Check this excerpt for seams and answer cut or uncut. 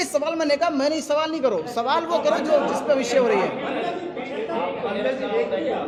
uncut